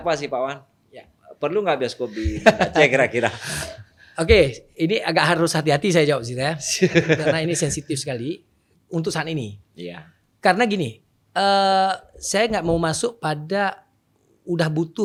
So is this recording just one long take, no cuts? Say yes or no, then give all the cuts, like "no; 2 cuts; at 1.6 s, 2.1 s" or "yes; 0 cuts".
yes; 0 cuts